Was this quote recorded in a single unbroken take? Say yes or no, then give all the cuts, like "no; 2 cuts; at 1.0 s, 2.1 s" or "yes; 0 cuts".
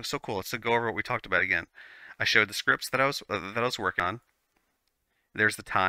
yes; 0 cuts